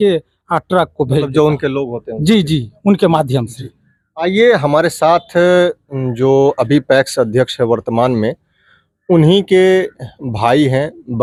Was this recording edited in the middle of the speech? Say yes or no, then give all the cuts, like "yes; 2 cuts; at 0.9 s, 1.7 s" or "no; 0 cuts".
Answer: no; 0 cuts